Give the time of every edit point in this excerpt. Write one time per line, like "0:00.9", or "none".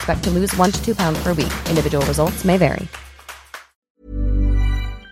0:03.7